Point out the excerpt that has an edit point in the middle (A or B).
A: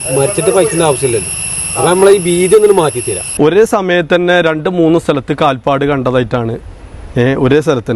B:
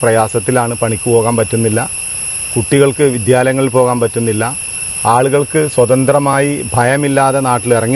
A